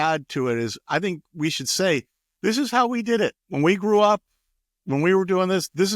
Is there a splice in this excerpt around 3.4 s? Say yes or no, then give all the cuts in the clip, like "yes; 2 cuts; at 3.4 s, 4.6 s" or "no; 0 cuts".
yes; 1 cut; at 3.4 s